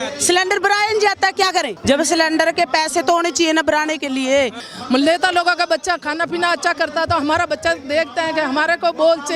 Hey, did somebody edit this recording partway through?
yes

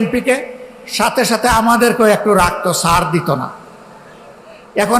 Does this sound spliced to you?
no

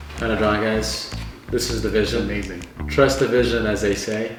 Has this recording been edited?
no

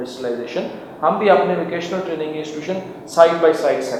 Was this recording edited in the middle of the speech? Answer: no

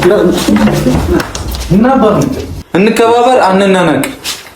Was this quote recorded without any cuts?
no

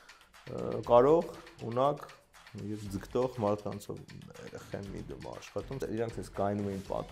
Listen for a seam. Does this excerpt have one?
yes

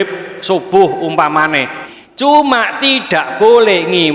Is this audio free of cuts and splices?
no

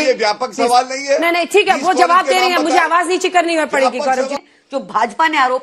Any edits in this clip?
yes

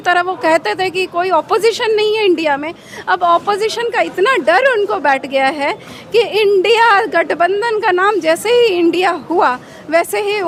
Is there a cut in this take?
no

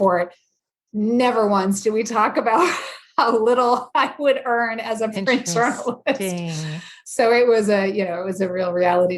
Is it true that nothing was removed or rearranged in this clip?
yes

